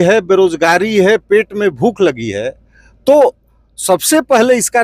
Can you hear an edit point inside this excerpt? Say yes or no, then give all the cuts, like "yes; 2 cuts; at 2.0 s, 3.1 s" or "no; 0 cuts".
no; 0 cuts